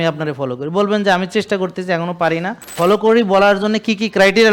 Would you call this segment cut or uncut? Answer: cut